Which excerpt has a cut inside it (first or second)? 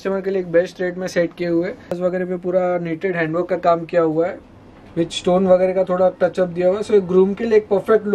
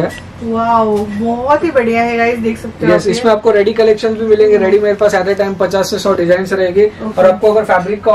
first